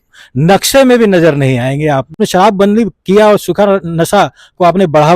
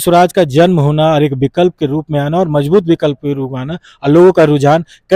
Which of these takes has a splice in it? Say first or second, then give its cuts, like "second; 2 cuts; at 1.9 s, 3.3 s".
first; 1 cut; at 2.2 s